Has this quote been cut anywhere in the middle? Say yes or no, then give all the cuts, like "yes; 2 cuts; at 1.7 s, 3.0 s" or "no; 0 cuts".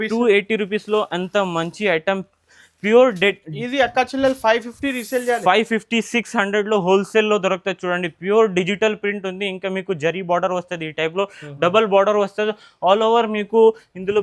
no; 0 cuts